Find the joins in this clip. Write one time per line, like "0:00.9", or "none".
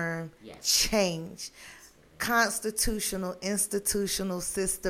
none